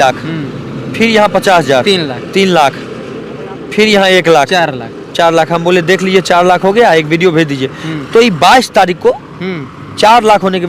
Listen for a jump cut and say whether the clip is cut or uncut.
uncut